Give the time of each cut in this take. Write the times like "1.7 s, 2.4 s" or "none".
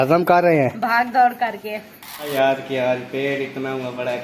2.3 s